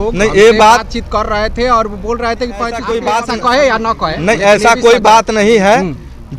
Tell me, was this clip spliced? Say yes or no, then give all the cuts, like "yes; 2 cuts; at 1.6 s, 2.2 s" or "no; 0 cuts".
yes; 1 cut; at 2.8 s